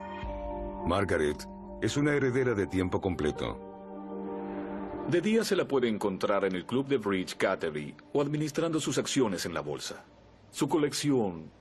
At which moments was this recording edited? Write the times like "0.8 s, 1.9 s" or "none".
none